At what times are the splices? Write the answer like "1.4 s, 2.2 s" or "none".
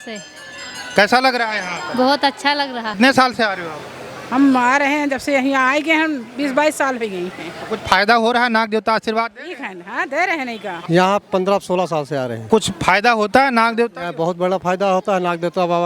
2.9 s, 10.7 s, 12.4 s